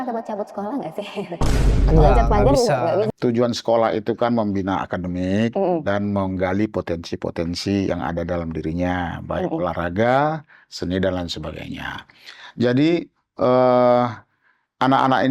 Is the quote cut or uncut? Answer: cut